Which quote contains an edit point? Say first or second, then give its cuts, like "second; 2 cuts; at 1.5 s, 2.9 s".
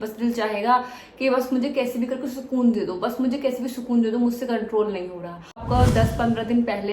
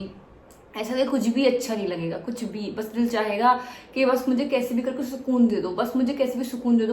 first; 1 cut; at 5.6 s